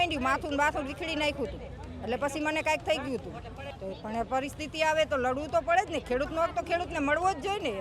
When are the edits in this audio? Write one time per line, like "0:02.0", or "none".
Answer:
0:03.7